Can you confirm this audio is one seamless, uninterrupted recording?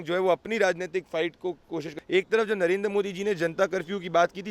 no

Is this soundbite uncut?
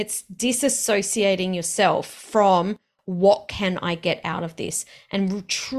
yes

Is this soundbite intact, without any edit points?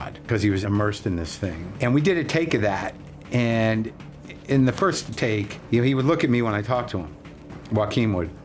yes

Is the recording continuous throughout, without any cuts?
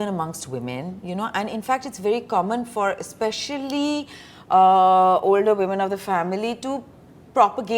yes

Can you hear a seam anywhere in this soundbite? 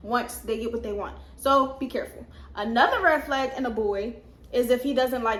no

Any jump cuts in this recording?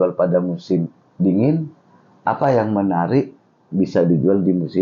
no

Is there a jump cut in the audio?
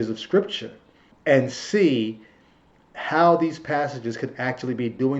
yes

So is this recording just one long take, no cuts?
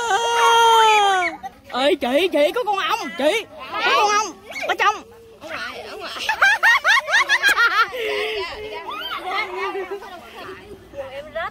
no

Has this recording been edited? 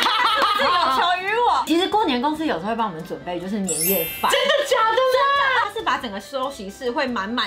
yes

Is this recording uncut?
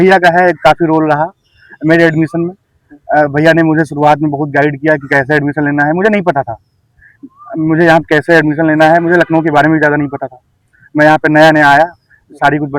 yes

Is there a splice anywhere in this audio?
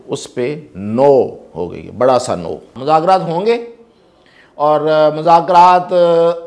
yes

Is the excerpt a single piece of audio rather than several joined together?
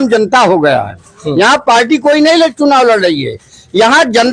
yes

